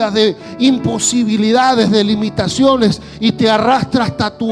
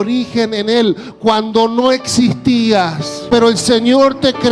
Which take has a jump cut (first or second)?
second